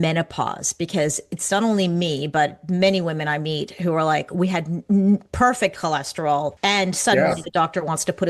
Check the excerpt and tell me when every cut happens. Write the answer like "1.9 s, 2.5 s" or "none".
6.5 s